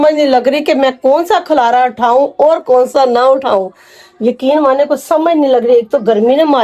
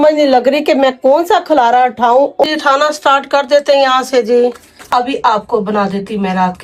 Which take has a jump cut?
second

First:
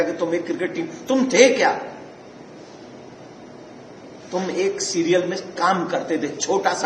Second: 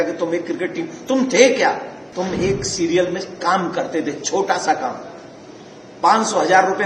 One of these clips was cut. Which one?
second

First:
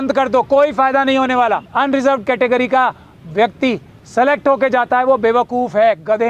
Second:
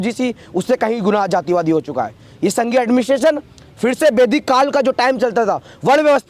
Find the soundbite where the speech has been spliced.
first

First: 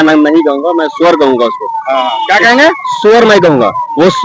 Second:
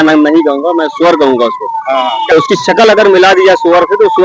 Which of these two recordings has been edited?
second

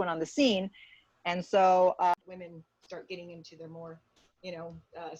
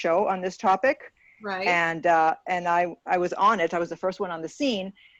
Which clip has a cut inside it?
first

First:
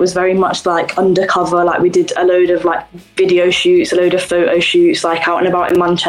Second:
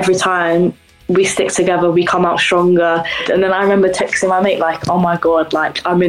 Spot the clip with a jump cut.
second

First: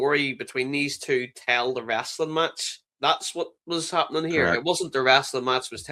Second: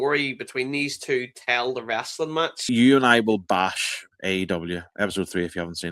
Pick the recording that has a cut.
second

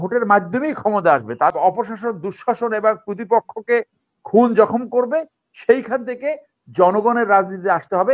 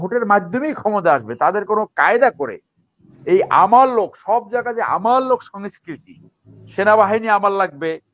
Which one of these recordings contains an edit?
first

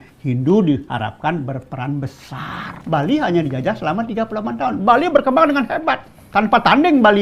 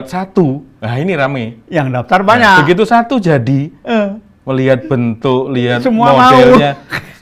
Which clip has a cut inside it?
first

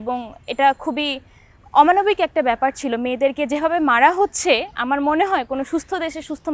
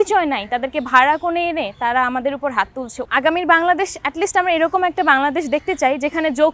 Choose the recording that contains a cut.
second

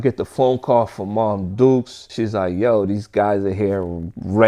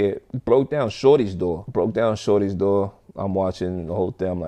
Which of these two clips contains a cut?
first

